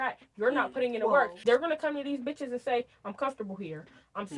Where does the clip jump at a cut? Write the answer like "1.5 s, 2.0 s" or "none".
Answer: 1.3 s